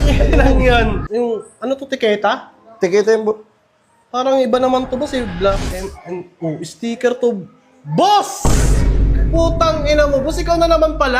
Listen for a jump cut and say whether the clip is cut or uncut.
cut